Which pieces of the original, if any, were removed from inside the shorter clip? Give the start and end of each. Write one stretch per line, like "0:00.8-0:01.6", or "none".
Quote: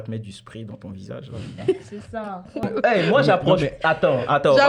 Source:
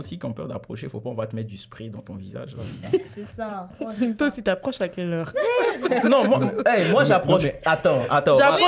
0:03.9-0:06.5